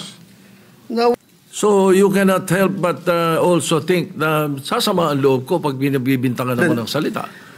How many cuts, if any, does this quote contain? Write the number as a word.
zero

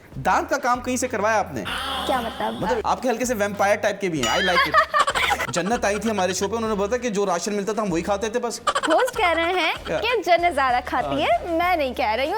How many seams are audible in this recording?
three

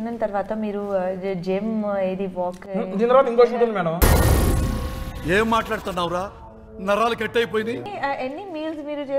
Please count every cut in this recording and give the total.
one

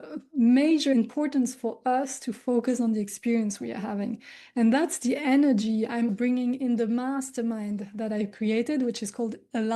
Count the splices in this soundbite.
one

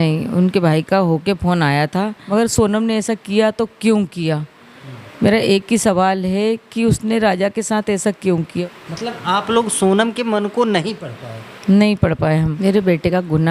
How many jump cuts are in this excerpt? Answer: three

